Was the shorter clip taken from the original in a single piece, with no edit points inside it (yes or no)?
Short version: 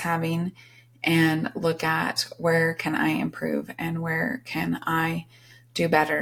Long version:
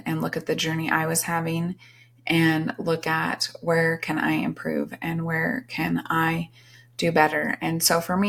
yes